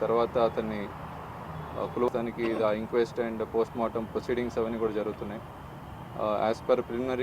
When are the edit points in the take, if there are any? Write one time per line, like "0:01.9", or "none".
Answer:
0:02.1